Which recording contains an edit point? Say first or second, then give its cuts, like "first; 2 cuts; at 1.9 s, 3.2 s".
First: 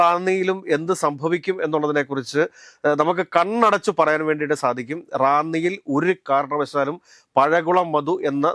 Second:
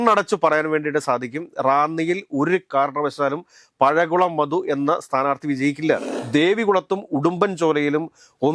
second; 1 cut; at 6.1 s